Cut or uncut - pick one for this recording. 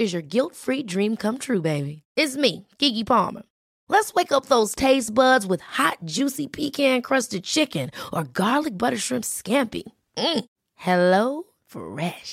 uncut